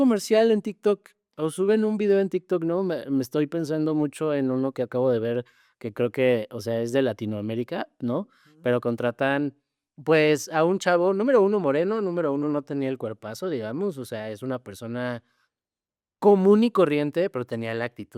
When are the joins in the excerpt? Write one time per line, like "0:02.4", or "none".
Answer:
none